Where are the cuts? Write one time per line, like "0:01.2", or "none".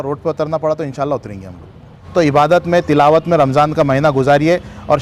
0:01.9